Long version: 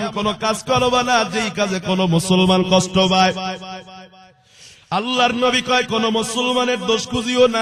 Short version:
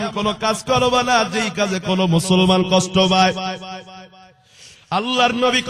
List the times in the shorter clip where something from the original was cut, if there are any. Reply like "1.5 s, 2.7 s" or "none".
none